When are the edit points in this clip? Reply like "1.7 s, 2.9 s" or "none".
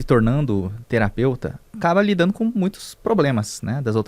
1.7 s

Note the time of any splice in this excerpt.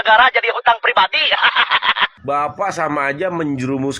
2.2 s

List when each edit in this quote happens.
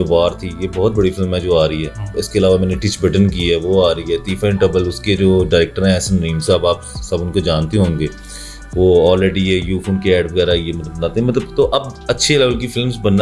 none

